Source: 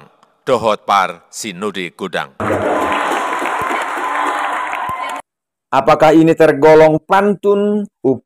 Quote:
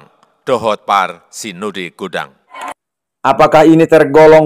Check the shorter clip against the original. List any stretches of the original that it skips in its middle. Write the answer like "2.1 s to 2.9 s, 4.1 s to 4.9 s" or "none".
2.4 s to 4.9 s